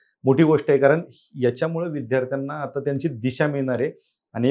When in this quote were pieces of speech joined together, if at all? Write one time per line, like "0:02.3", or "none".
none